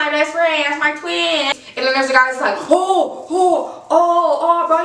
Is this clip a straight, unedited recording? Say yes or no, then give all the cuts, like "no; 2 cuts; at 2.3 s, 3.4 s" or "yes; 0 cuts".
no; 1 cut; at 1.5 s